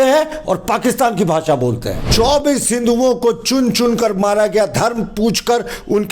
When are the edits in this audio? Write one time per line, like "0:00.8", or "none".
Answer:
0:02.1